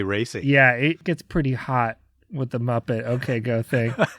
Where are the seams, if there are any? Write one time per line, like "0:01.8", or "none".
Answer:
0:01.0